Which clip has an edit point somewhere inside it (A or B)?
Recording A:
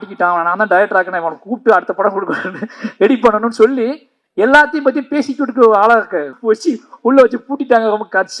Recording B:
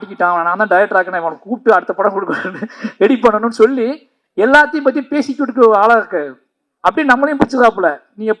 A